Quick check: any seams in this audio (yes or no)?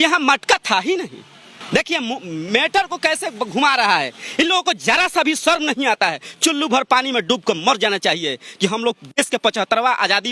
no